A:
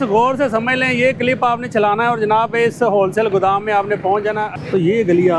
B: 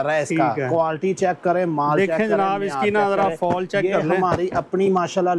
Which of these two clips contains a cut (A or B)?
A